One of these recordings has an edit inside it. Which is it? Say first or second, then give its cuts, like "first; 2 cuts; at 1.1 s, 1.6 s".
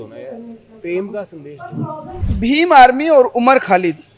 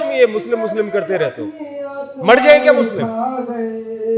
first; 1 cut; at 2.2 s